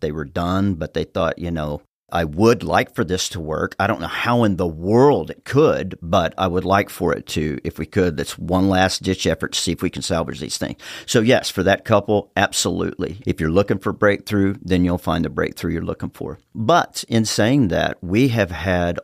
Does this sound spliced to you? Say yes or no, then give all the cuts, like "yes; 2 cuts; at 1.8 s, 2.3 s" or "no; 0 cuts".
yes; 1 cut; at 13.2 s